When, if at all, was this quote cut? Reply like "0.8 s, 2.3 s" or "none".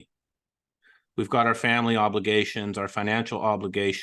none